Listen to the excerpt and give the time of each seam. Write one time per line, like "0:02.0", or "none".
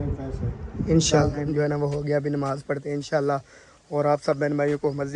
0:01.4